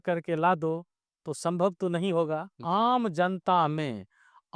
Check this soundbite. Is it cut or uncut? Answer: cut